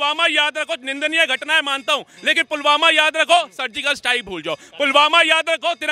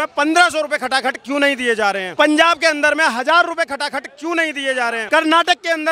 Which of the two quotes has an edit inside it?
second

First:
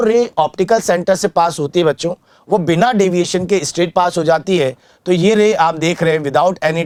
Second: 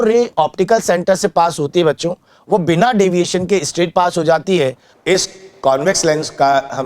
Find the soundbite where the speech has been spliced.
second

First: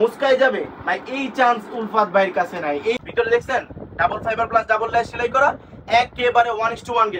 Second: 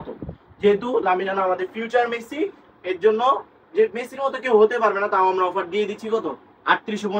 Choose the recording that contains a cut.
first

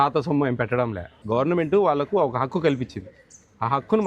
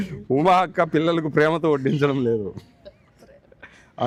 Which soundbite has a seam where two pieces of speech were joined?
first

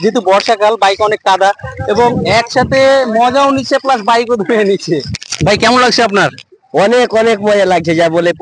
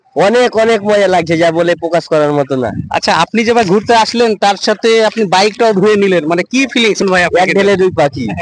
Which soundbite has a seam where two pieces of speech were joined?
first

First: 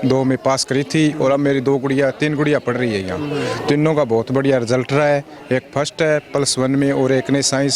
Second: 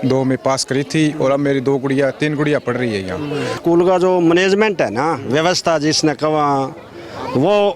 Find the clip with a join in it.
second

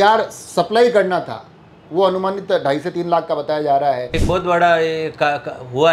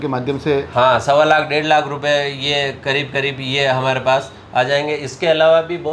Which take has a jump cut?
first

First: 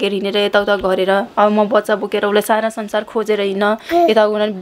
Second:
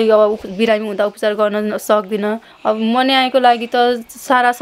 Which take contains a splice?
second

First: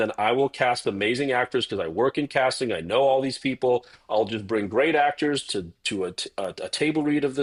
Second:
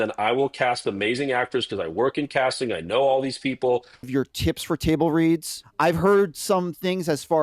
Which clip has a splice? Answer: second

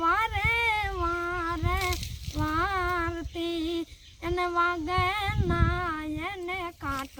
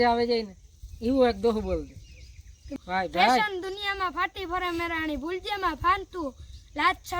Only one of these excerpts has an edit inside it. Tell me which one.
second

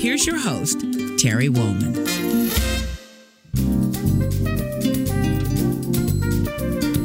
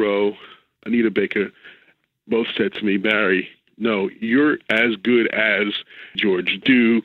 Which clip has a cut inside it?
second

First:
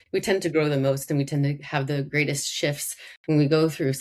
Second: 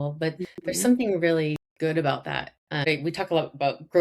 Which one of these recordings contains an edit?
second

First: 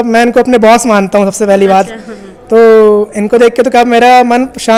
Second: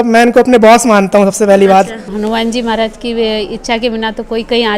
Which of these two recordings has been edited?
second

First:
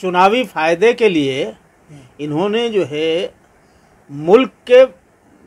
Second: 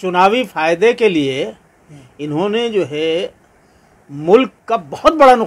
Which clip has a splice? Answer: second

